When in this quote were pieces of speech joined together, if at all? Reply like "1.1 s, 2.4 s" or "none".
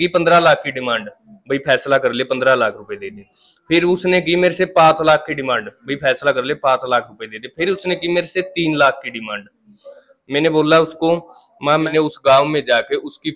11.9 s